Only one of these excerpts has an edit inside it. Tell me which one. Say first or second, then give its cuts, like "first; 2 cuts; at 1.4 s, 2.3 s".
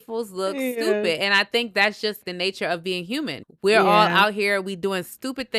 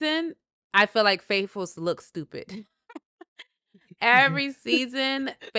first; 2 cuts; at 2.2 s, 3.4 s